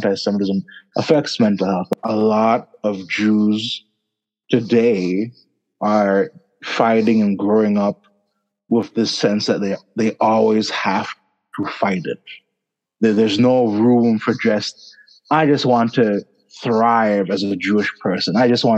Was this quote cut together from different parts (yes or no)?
yes